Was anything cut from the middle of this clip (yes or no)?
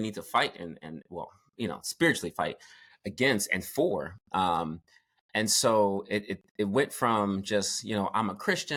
no